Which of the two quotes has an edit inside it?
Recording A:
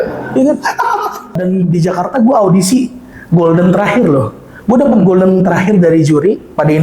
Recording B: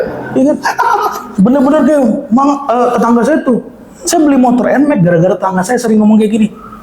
A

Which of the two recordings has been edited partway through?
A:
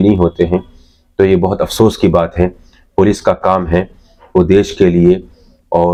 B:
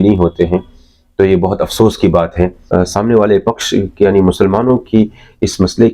B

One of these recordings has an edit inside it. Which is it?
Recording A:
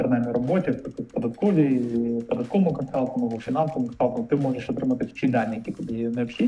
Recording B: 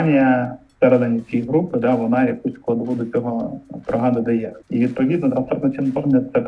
B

